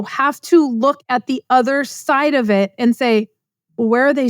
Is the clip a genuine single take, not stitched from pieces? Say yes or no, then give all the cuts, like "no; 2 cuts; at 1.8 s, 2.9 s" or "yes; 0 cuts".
yes; 0 cuts